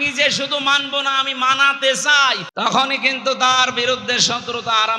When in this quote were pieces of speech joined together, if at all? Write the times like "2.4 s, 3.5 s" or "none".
2.5 s